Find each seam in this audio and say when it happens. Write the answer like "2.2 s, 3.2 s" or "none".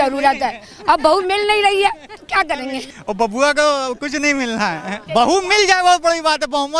2.8 s, 5.0 s